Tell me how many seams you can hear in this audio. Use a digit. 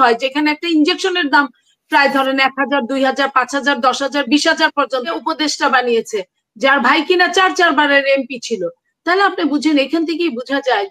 1